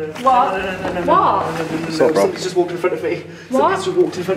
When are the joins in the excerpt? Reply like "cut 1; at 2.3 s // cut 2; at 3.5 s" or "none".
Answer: none